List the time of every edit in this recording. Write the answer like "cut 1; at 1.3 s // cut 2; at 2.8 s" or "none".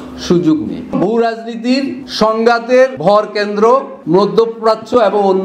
cut 1; at 0.9 s // cut 2; at 2.0 s // cut 3; at 3.0 s // cut 4; at 3.9 s